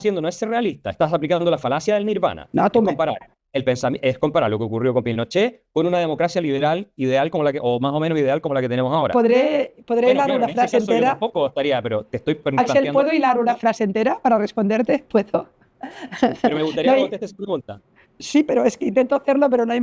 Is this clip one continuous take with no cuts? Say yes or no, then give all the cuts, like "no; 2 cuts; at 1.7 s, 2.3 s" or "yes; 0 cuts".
yes; 0 cuts